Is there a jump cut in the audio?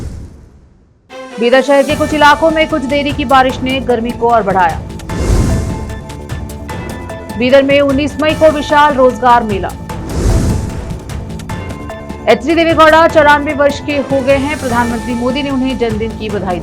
yes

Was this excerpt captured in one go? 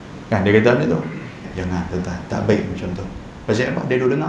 no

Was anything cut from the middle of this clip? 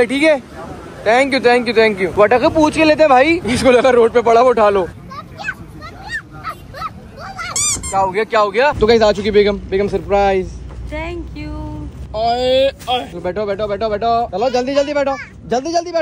no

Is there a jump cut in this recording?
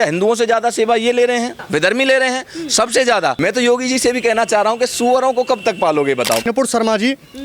yes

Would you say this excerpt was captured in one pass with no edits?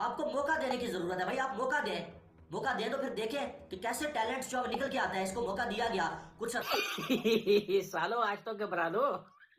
no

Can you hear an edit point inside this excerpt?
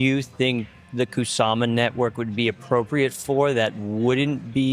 no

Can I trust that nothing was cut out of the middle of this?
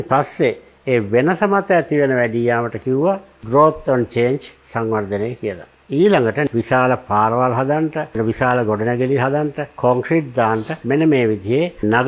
no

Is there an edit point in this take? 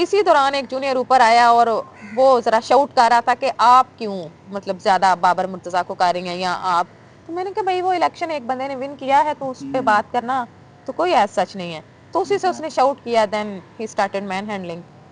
no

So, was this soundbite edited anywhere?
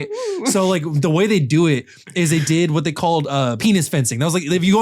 yes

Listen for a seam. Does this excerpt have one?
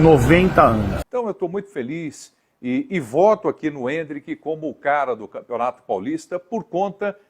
yes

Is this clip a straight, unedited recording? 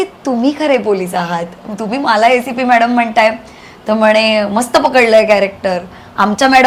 yes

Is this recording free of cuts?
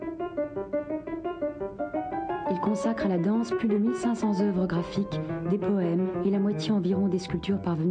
no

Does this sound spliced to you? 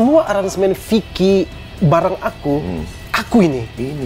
yes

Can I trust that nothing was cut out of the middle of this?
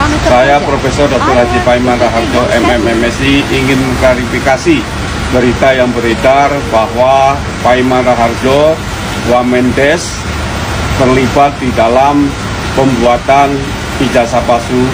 yes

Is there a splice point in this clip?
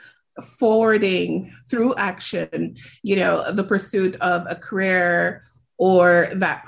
no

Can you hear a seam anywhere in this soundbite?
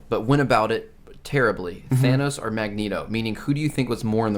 yes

